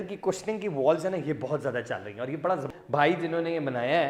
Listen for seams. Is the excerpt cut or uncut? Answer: cut